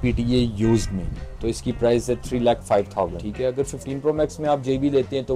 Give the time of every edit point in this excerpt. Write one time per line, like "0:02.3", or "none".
0:03.2